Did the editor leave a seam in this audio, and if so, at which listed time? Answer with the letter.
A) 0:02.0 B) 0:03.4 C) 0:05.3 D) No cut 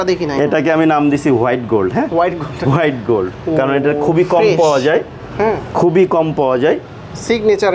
D